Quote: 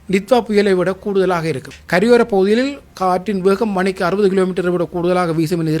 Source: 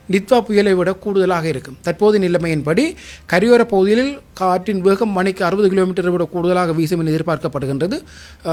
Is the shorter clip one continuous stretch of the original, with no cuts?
no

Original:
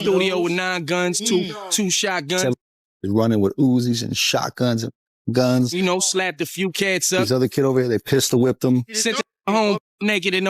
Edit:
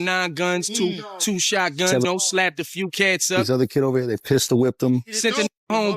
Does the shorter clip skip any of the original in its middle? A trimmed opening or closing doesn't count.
yes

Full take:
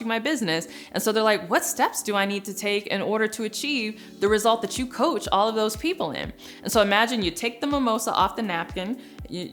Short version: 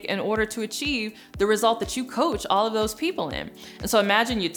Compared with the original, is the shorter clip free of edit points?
yes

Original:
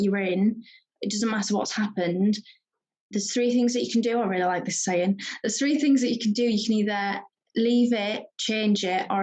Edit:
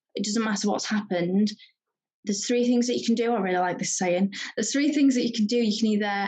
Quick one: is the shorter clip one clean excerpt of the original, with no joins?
yes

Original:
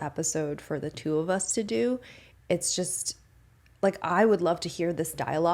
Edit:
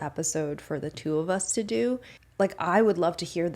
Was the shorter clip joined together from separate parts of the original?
yes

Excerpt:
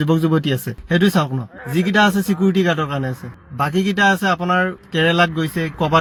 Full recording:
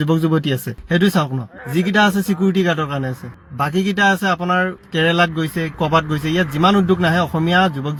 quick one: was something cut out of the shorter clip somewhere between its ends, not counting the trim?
no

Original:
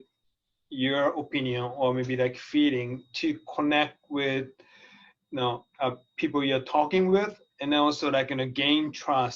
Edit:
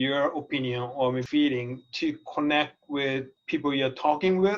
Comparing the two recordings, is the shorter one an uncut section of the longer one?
no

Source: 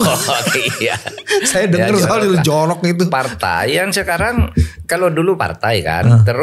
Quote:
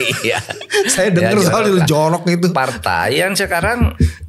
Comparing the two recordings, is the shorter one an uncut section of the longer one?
yes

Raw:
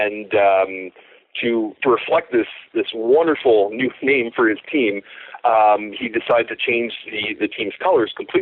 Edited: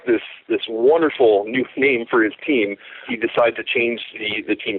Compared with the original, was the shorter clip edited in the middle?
yes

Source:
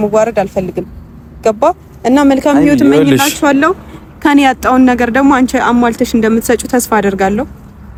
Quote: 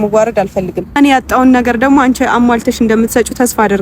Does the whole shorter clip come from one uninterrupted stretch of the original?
no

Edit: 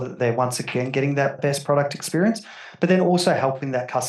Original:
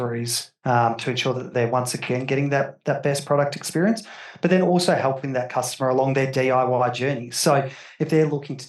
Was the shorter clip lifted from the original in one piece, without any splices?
no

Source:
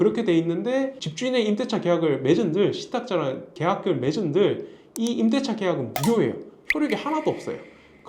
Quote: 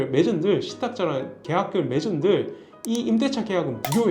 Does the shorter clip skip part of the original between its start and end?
no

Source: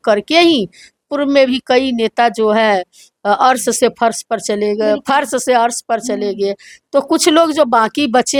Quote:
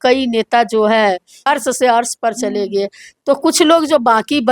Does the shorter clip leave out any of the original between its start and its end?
yes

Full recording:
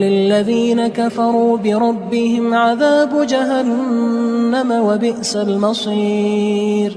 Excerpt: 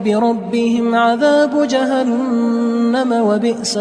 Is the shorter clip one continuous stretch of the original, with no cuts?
yes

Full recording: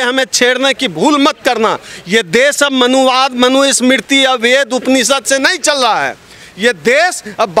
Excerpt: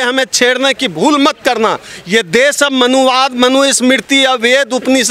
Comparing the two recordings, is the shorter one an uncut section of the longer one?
yes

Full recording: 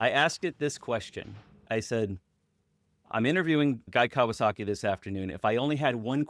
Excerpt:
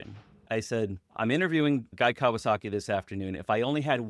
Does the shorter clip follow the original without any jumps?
no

